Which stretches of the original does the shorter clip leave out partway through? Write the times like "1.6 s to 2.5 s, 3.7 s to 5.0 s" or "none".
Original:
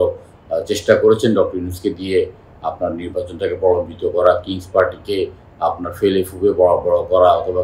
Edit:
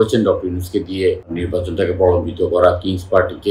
2.4 s to 3.0 s